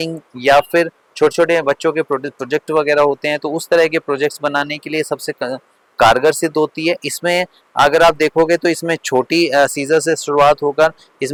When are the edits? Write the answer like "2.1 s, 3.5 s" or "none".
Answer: none

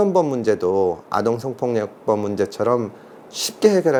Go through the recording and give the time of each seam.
none

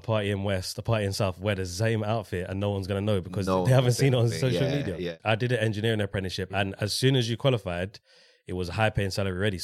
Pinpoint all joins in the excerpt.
5.1 s

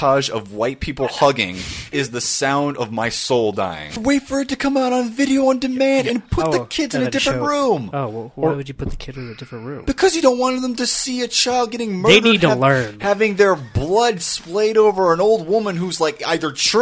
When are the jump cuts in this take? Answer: 1.9 s, 4.0 s

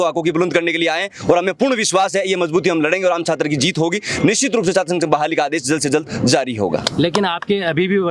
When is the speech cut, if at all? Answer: none

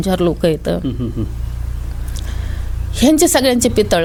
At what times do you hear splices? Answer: none

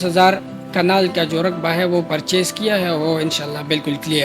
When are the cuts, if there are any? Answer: none

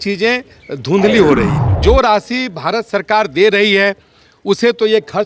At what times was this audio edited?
1.6 s

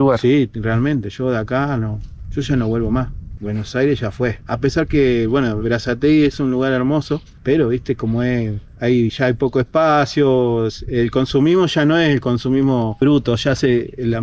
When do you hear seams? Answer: none

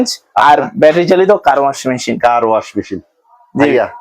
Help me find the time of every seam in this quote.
none

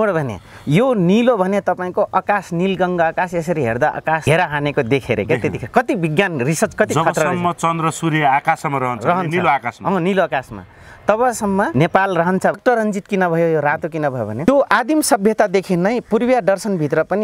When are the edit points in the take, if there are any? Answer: 4.2 s, 11.7 s, 12.6 s

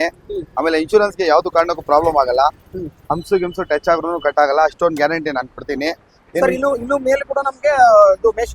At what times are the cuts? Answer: none

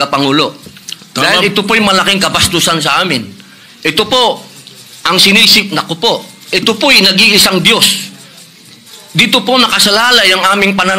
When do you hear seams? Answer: none

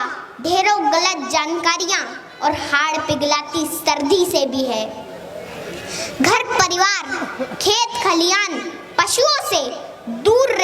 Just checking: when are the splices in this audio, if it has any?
none

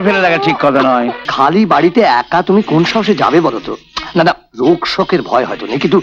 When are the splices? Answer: 1.2 s

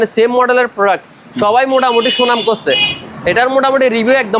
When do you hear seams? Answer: none

